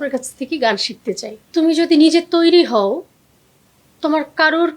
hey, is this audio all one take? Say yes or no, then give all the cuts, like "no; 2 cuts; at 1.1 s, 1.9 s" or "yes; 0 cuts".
no; 1 cut; at 1.3 s